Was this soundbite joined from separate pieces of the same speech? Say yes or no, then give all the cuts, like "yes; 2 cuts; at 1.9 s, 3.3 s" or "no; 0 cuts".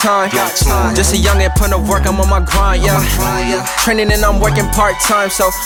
no; 0 cuts